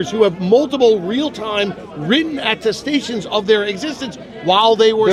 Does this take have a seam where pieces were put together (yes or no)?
no